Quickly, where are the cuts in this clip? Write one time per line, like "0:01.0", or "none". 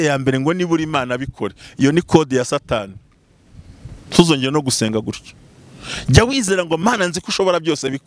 none